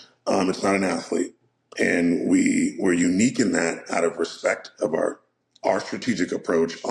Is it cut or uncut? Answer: uncut